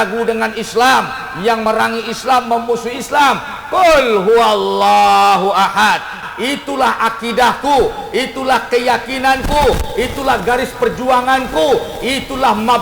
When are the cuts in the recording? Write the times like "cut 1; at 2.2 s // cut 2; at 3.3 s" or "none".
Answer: cut 1; at 1.6 s // cut 2; at 6.2 s